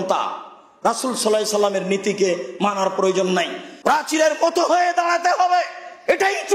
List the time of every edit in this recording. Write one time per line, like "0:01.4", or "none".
0:03.6